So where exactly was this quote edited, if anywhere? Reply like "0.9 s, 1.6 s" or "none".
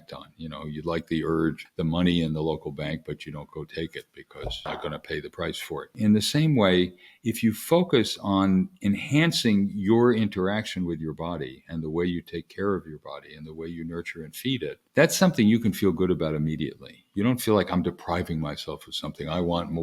1.6 s, 4.7 s, 6.0 s, 14.8 s